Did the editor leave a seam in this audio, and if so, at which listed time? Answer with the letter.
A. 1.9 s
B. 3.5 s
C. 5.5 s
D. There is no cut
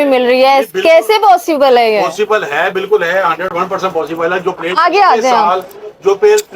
D